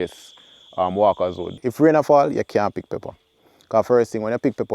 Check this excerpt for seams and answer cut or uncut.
cut